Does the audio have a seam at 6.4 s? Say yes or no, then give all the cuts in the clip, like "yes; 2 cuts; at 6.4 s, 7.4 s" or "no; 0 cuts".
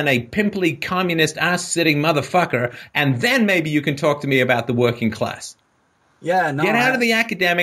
no; 1 cut; at 3.7 s